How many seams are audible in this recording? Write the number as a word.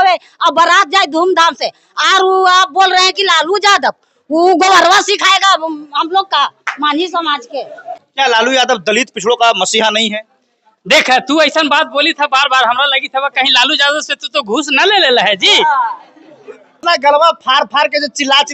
two